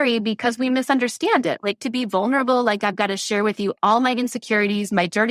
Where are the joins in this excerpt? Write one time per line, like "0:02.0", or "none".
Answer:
0:01.6